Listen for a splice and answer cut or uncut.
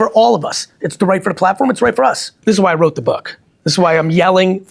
cut